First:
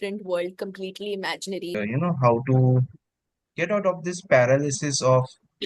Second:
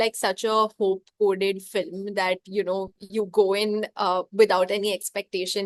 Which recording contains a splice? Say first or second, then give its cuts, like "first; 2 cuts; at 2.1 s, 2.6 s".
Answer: first; 1 cut; at 1.7 s